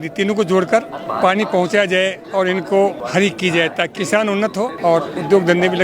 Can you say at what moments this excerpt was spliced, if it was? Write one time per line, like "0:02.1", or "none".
0:01.0
0:03.0
0:04.4